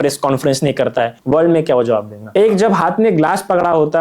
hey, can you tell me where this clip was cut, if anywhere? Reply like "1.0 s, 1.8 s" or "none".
1.2 s, 2.3 s